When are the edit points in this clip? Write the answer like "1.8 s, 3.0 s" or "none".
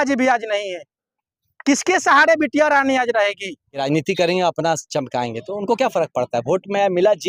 3.8 s